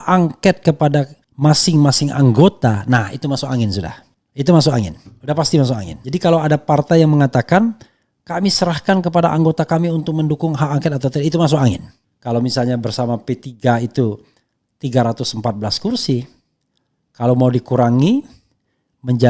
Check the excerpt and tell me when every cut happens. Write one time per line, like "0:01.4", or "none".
0:11.9